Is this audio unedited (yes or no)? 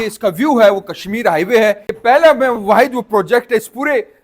no